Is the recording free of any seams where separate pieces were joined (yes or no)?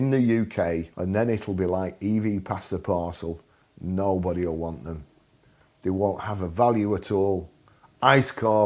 no